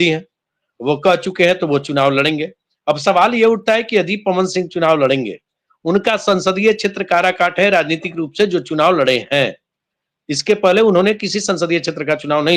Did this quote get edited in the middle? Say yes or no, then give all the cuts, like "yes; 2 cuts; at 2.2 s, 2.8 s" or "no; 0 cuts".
no; 0 cuts